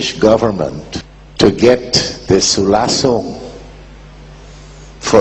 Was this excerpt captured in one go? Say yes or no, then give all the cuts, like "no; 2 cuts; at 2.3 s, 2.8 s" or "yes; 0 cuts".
no; 1 cut; at 1.2 s